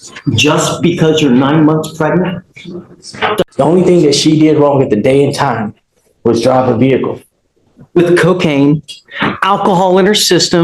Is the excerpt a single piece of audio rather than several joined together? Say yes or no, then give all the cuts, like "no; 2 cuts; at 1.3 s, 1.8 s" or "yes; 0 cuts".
no; 1 cut; at 3.4 s